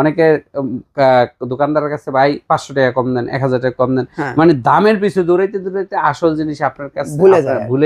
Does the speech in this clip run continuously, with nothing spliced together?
yes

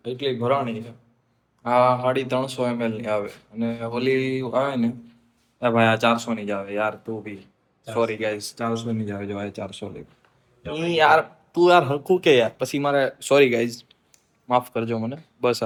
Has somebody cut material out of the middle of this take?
no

